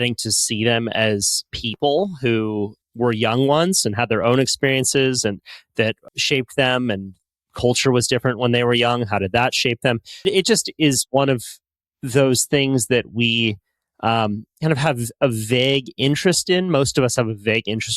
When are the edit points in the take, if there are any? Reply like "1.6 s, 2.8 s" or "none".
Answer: 2.8 s, 6.0 s, 10.2 s